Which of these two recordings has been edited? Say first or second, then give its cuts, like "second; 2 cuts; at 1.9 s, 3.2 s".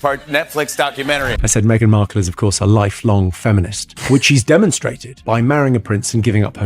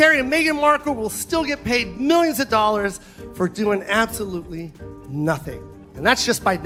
first; 1 cut; at 1.4 s